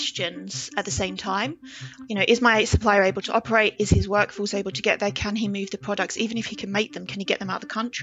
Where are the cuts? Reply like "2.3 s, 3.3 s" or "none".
3.7 s